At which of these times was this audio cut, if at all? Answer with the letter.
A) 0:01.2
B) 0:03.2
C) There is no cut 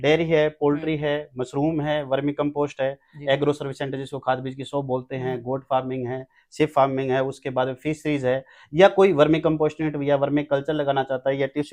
C